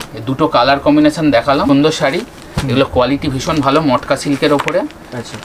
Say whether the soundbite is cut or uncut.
cut